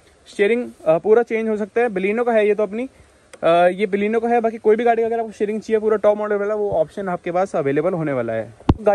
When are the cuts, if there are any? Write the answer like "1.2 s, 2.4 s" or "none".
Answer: none